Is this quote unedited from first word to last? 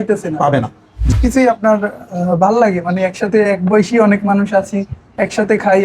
no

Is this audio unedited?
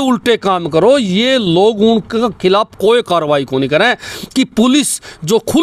no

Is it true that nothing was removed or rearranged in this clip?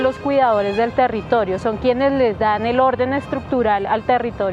yes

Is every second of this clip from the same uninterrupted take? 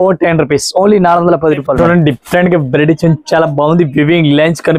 no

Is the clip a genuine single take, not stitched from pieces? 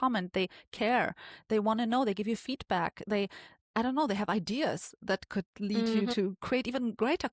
yes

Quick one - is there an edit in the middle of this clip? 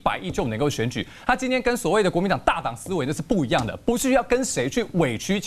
no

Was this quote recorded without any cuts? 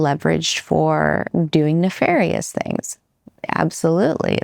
no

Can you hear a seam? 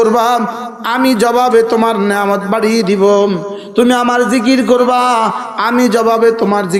no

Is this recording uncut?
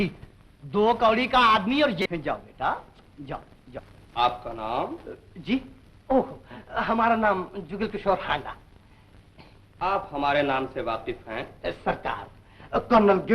no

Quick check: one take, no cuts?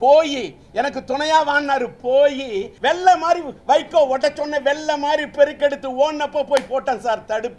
no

